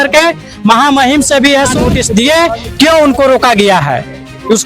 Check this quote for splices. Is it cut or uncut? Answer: cut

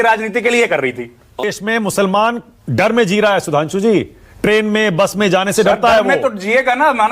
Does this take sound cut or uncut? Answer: cut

